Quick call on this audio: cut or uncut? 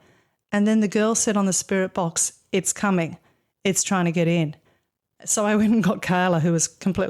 uncut